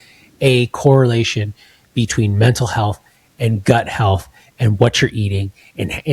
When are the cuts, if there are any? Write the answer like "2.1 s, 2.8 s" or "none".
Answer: none